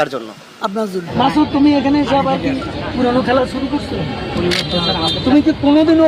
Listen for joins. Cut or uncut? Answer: cut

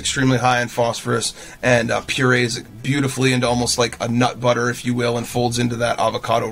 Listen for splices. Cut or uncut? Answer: uncut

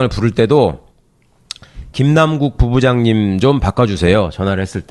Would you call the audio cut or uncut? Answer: cut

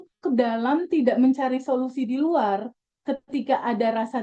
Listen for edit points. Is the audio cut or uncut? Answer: uncut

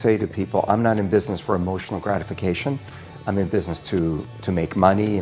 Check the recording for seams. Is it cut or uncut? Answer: uncut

